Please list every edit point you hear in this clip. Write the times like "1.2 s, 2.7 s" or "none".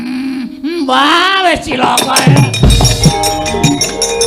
3.1 s